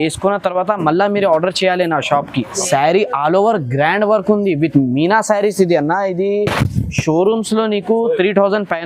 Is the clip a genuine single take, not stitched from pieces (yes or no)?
no